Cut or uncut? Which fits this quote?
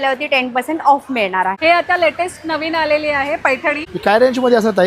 cut